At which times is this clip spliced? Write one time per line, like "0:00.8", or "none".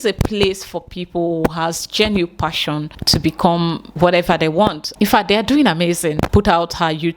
0:02.9
0:04.8
0:06.3